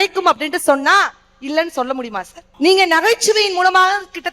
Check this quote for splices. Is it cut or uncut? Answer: cut